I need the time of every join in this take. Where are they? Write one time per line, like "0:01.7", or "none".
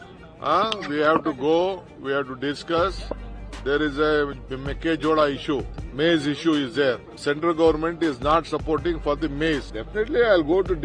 0:05.8
0:07.1
0:09.8